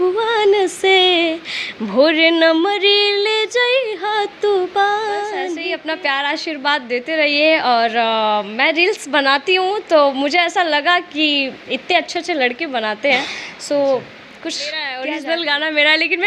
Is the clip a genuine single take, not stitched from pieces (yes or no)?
no